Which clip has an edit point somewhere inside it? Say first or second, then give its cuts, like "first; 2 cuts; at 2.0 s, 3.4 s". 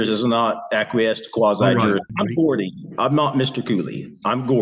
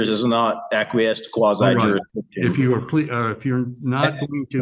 first; 1 cut; at 2.1 s